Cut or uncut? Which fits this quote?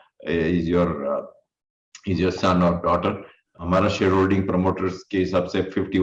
cut